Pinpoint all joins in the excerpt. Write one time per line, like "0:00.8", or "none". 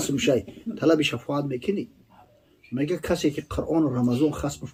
none